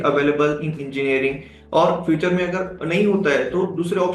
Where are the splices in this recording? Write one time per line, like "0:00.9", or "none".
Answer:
none